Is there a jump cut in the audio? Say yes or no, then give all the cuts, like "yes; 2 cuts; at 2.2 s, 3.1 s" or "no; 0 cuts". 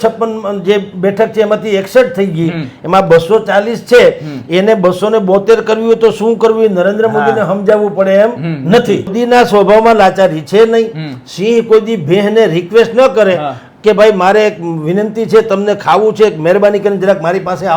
yes; 1 cut; at 9.1 s